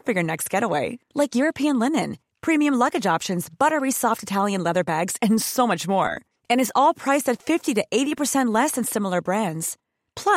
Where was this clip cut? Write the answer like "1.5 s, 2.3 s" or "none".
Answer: none

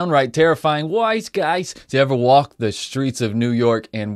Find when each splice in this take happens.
none

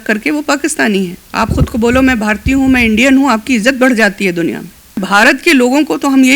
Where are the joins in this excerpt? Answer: 1.2 s, 5.0 s

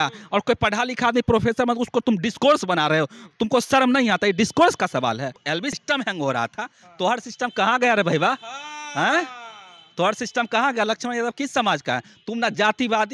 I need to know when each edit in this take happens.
5.4 s

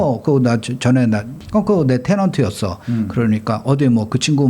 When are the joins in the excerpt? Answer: 1.4 s

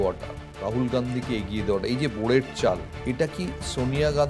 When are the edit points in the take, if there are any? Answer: 2.9 s

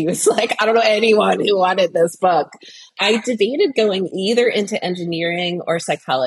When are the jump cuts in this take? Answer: 2.9 s, 4.1 s

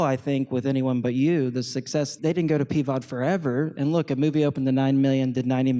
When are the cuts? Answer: 2.1 s

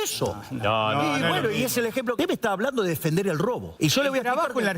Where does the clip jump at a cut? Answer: 2.2 s, 3.7 s

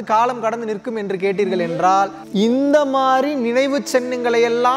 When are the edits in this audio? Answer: 2.2 s

